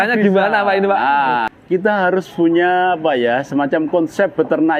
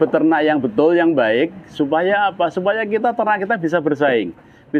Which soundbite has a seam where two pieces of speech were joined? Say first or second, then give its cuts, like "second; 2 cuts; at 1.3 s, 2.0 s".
first; 1 cut; at 1.5 s